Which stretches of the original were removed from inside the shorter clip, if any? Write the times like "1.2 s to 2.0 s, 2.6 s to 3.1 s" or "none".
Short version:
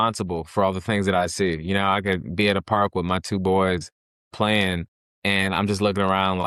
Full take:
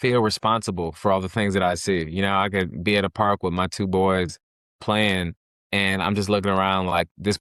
none